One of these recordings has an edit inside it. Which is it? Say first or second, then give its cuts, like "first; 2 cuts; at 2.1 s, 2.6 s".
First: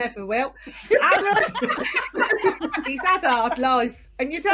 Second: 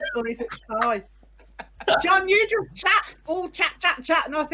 first; 1 cut; at 2.9 s